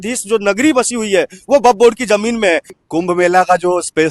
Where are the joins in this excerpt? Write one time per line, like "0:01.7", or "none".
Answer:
0:02.8